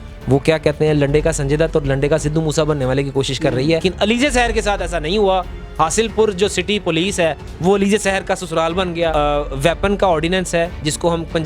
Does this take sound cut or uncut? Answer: cut